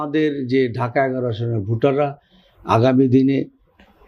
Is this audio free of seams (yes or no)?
yes